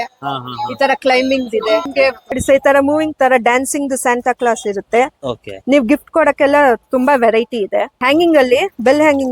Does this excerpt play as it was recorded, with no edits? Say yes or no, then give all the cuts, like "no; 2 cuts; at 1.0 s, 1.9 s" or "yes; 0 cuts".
no; 2 cuts; at 2.3 s, 7.9 s